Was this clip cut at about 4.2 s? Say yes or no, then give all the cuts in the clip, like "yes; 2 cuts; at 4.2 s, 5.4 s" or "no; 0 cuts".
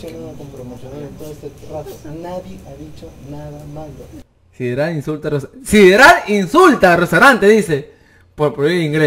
yes; 1 cut; at 4.2 s